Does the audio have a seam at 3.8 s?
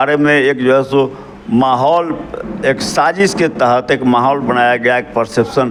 no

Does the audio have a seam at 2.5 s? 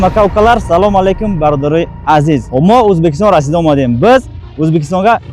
yes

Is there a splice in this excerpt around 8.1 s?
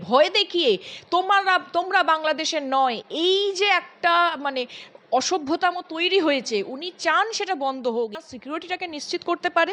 yes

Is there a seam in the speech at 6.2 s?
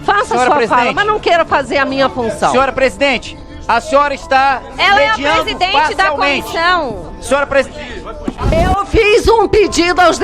no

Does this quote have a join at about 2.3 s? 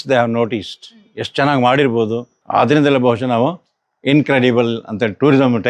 yes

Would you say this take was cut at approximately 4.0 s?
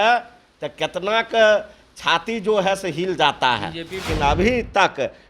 yes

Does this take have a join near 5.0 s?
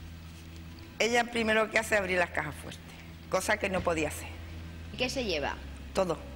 yes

